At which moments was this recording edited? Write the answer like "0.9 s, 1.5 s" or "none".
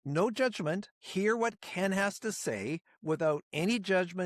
1.0 s